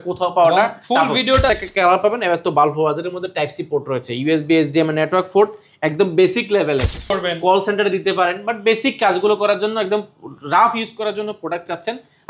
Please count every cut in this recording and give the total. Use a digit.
2